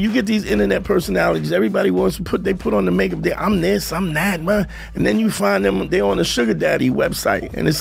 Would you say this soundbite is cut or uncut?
uncut